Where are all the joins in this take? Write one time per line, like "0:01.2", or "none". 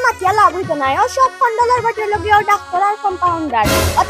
none